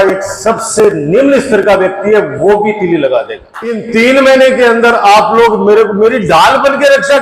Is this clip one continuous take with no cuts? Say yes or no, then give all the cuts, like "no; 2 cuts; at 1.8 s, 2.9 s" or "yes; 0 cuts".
no; 1 cut; at 3.8 s